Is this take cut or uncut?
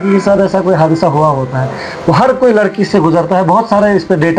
uncut